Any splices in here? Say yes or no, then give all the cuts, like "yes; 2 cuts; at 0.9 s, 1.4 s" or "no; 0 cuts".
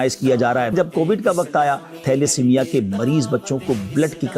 yes; 2 cuts; at 0.7 s, 2.0 s